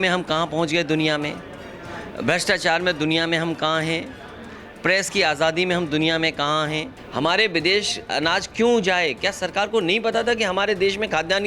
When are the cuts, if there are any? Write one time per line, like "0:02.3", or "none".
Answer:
0:07.0